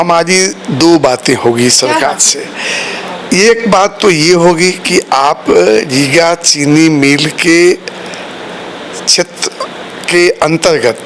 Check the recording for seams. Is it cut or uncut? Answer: uncut